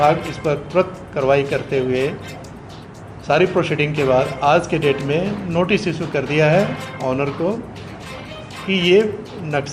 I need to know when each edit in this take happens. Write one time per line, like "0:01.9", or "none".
none